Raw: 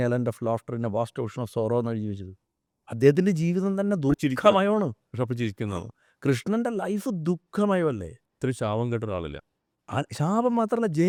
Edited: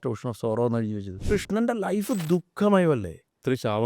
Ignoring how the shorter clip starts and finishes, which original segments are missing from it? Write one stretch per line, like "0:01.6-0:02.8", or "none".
0:02.3-0:06.2